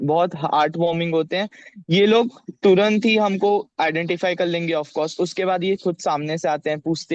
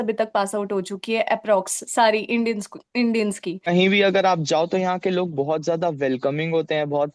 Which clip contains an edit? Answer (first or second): second